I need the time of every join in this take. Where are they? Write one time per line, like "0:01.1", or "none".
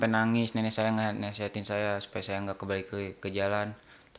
none